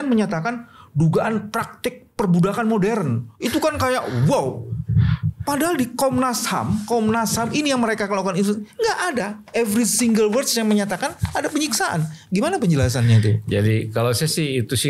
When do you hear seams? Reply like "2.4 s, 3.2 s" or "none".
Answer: none